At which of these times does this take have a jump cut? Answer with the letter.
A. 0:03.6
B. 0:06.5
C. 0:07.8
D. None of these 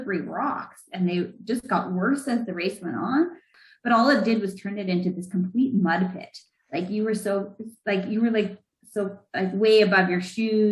A